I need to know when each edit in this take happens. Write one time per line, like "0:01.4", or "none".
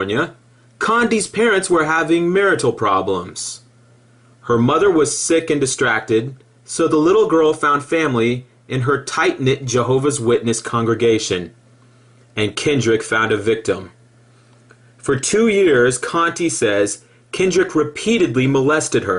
0:16.0